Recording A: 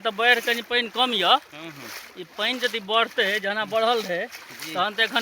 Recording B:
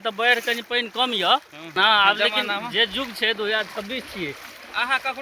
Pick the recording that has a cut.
B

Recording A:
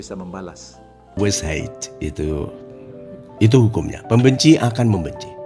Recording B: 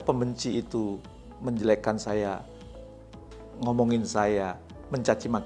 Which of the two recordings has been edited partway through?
A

